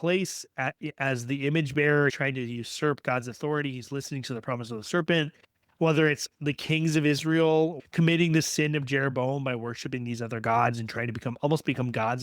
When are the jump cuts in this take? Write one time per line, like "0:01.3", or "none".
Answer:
0:02.2
0:07.8